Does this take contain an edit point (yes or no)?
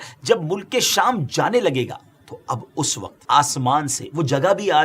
yes